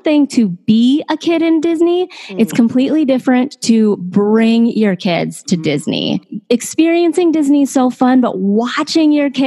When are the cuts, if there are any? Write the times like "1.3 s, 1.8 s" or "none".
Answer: 6.3 s